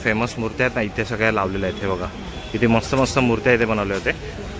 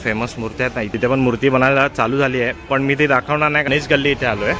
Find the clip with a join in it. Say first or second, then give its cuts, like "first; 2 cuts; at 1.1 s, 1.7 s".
second; 2 cuts; at 0.9 s, 3.7 s